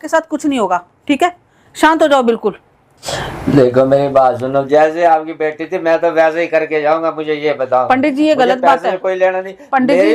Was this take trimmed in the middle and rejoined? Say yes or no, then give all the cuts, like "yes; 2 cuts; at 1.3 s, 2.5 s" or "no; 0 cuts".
yes; 1 cut; at 3.1 s